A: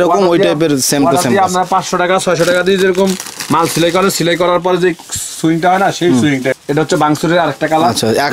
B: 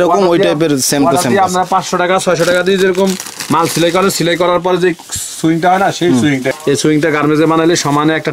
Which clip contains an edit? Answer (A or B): B